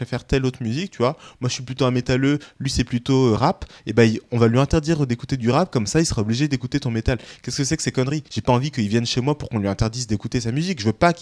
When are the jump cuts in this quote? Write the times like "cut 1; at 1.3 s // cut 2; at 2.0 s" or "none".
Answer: none